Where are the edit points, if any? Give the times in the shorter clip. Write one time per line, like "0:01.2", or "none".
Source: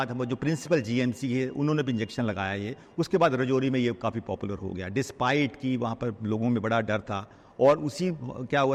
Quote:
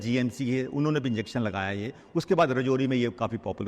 none